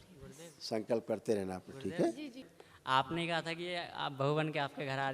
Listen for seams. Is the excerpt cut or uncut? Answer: cut